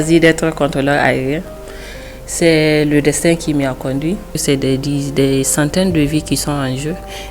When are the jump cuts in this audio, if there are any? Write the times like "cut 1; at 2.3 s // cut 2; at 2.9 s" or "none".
cut 1; at 4.4 s